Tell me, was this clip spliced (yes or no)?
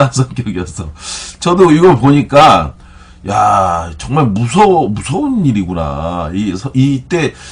yes